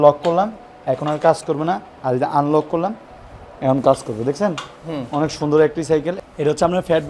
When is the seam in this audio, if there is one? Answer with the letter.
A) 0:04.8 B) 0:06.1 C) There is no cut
B